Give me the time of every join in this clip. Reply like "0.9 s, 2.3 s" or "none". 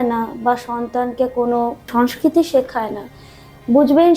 1.9 s